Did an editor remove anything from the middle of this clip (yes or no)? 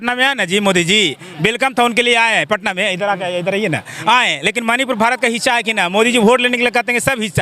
no